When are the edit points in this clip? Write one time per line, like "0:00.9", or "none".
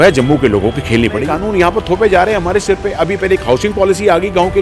0:01.2